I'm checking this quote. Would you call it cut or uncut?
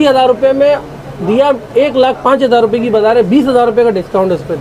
uncut